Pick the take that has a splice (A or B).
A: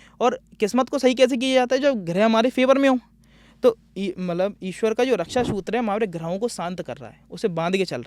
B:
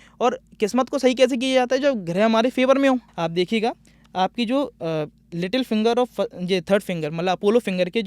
B